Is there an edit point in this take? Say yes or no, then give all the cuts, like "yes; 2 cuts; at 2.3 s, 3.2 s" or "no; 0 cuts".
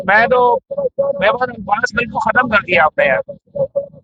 no; 0 cuts